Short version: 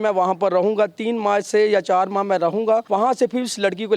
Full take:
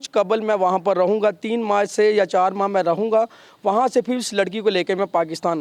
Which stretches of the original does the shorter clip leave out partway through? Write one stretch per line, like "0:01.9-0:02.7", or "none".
0:03.3-0:03.6